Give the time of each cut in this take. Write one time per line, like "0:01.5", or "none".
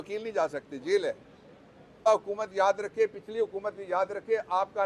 0:02.0